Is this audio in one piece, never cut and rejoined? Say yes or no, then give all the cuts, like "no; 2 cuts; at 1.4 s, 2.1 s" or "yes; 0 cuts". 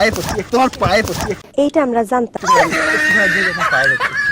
no; 1 cut; at 1.3 s